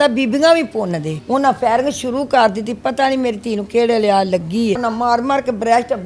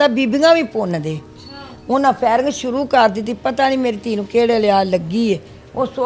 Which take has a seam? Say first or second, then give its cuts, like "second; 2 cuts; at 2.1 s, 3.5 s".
first; 2 cuts; at 1.1 s, 4.8 s